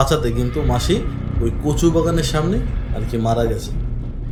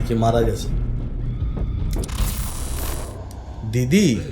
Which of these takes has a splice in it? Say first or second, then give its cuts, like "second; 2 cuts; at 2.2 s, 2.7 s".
second; 1 cut; at 2.5 s